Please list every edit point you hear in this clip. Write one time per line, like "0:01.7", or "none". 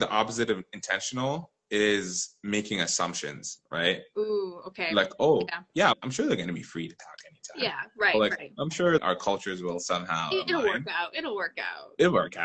0:06.0
0:09.0